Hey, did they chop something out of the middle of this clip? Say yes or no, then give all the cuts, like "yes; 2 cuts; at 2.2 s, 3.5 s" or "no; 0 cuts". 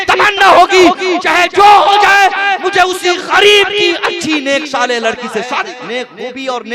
yes; 1 cut; at 5.7 s